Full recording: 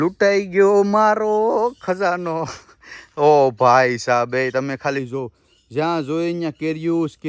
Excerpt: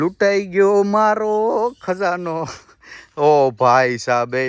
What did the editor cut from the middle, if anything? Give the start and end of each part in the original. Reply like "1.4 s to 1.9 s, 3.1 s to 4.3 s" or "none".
none